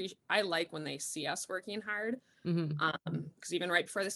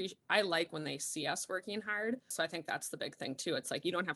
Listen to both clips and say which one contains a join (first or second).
second